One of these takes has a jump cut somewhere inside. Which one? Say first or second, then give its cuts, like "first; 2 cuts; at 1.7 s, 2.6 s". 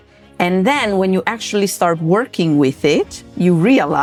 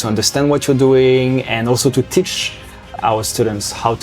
second; 1 cut; at 2.8 s